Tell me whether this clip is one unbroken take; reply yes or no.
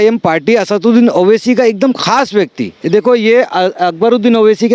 yes